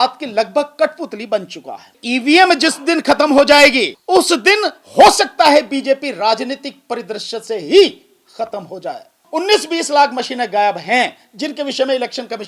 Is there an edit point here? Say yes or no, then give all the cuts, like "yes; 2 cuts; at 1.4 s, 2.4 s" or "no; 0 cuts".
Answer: yes; 3 cuts; at 2.0 s, 3.9 s, 9.2 s